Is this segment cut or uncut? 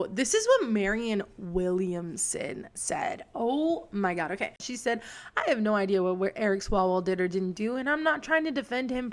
cut